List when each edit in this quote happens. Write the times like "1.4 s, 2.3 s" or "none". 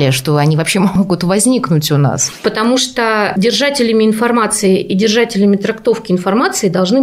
1.0 s, 2.4 s

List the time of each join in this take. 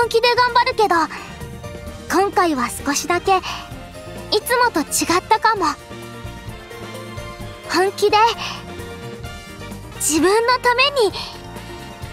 8.4 s, 10.0 s

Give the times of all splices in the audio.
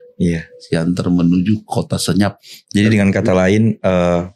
2.4 s

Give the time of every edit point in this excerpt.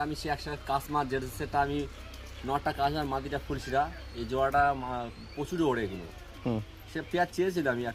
none

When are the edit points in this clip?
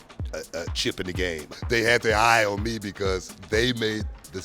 1.5 s

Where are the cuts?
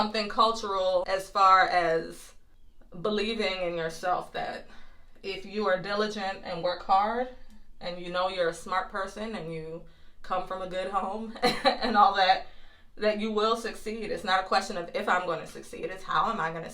1.1 s

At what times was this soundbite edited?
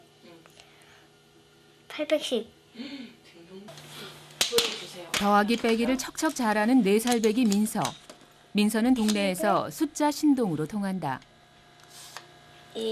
none

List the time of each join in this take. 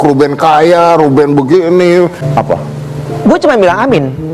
2.2 s

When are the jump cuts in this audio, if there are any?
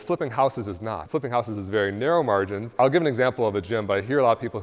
1.0 s, 2.8 s

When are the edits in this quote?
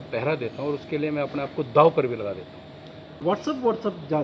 3.2 s

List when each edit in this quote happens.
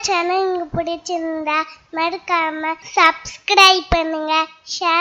2.8 s

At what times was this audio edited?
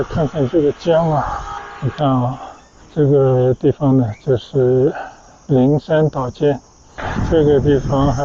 7.1 s

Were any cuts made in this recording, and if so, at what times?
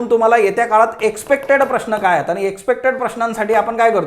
none

